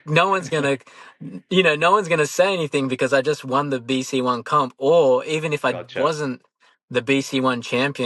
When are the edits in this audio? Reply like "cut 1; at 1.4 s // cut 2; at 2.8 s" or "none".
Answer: none